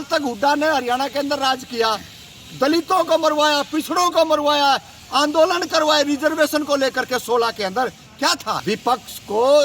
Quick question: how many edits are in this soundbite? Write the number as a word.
one